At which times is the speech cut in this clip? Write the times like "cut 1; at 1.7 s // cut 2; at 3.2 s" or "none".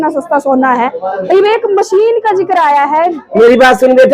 cut 1; at 3.2 s